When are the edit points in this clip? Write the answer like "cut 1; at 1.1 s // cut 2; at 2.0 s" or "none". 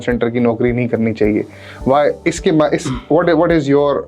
none

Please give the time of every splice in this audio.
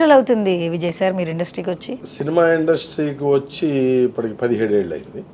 cut 1; at 1.9 s

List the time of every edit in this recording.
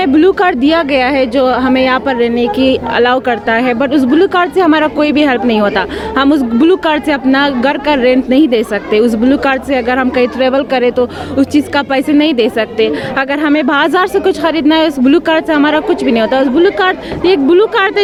none

